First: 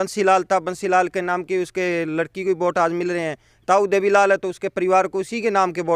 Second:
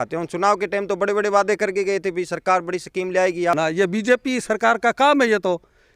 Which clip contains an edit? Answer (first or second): second